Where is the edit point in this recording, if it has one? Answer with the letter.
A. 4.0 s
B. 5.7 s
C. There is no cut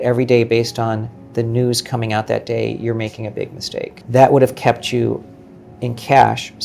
A